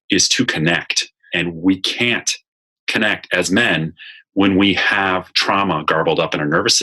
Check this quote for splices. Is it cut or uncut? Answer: cut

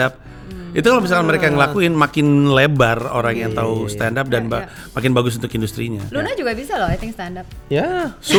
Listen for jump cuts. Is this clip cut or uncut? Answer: uncut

